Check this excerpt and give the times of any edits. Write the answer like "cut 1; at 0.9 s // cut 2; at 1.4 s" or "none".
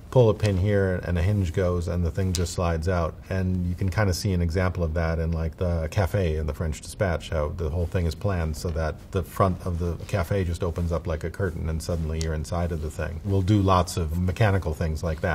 cut 1; at 14.1 s

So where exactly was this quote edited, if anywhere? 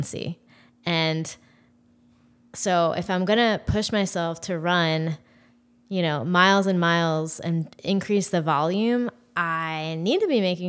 none

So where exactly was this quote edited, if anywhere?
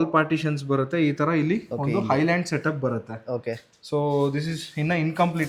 none

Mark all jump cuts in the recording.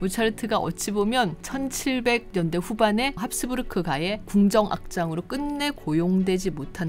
none

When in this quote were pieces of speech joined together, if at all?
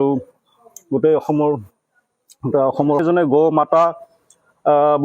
cut 1; at 3.0 s

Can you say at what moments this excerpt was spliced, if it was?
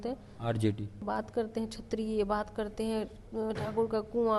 cut 1; at 1.0 s

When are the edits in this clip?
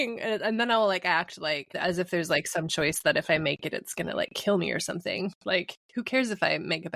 none

